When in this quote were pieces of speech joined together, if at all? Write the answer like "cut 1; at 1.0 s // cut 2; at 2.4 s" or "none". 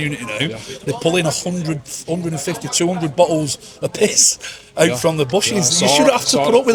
none